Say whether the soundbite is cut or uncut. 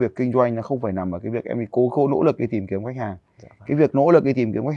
uncut